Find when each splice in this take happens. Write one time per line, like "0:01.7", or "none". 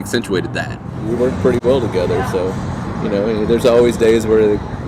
0:00.9